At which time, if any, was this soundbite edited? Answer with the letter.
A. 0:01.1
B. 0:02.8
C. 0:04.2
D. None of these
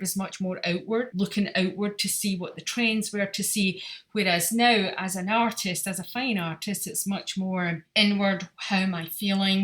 A